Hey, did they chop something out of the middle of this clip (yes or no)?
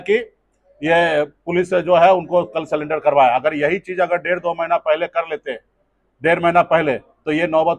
no